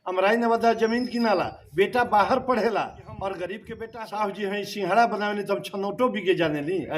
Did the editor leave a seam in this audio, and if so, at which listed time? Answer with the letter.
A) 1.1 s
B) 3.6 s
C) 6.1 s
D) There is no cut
B